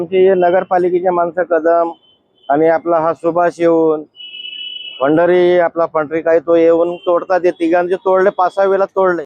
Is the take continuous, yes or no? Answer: yes